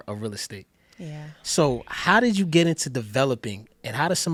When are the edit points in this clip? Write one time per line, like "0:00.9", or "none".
none